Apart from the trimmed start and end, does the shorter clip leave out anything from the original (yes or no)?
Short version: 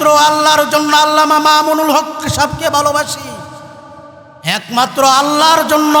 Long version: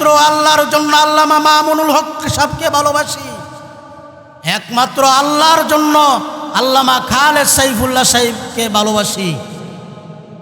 no